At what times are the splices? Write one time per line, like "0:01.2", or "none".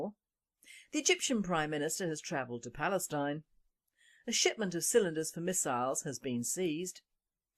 0:05.1